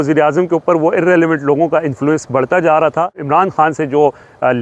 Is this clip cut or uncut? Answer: cut